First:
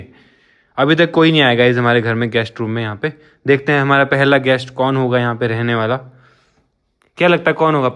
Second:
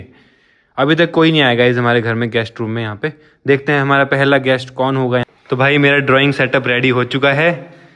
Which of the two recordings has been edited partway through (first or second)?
second